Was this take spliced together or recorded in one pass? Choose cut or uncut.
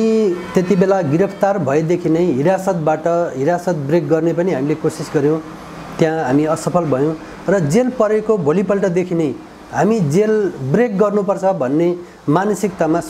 uncut